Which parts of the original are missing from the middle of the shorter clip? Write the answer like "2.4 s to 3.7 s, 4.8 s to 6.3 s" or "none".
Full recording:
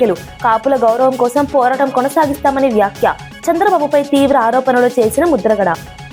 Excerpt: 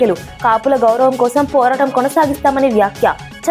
none